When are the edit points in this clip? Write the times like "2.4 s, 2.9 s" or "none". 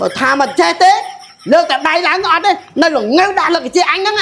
none